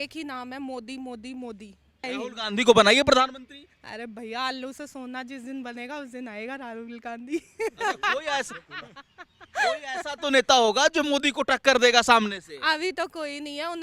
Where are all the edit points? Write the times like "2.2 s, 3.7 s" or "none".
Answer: 1.8 s

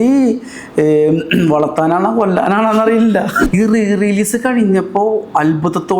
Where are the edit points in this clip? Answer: 3.4 s

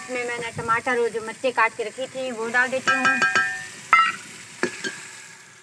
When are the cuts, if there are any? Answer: none

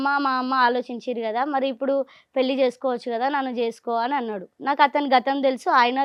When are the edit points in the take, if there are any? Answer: none

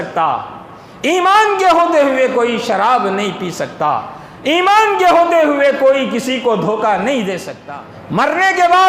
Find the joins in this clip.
7.6 s

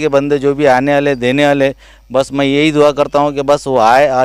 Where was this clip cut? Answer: none

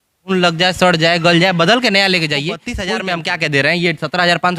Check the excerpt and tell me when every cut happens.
2.7 s

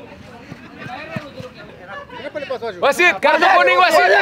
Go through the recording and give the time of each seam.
1.8 s

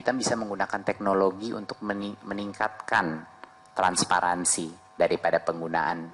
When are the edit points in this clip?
none

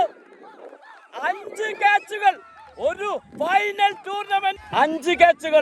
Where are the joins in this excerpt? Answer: 4.6 s

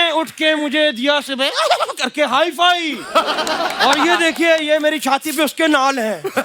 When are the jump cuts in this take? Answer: none

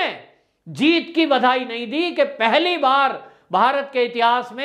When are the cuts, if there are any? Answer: none

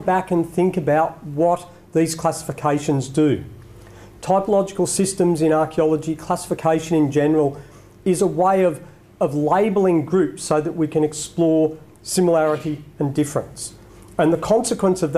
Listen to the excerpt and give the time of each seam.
none

